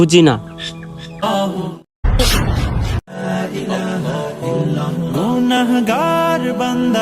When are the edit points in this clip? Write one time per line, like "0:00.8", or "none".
0:01.2